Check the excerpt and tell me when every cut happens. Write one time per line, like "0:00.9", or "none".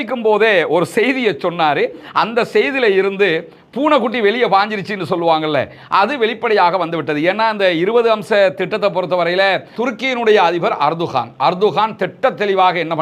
0:09.7